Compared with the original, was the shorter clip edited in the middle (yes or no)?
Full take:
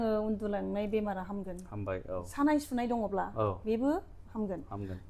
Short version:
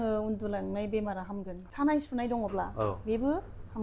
yes